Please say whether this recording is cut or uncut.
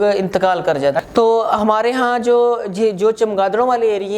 cut